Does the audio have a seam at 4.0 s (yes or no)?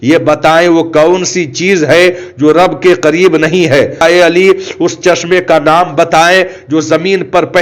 yes